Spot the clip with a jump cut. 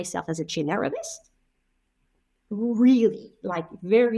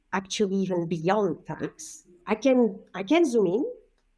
second; 1 cut; at 2.2 s

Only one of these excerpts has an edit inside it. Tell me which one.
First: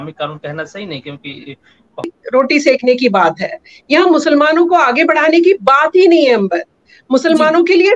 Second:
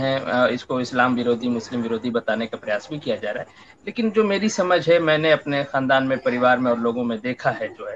first; 1 cut; at 2.1 s

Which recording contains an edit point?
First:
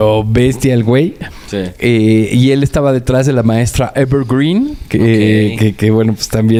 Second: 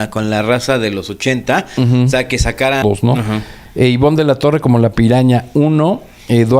second; 1 cut; at 2.8 s

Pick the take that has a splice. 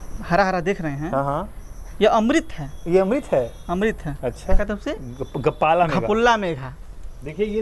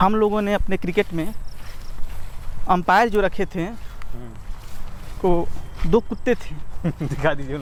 first; 1 cut; at 4.4 s

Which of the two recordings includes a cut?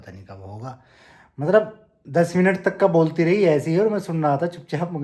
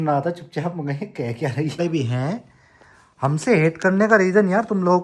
second; 1 cut; at 1.8 s

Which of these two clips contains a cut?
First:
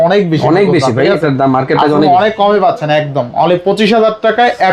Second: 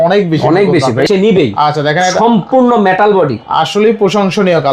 second; 1 cut; at 1.1 s

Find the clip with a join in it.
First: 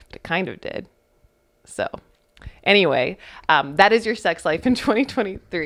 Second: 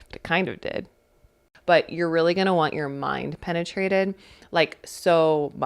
second; 1 cut; at 1.5 s

